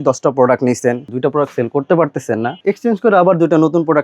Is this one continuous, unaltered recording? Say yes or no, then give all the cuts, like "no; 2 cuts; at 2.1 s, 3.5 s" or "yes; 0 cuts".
no; 2 cuts; at 1.1 s, 2.6 s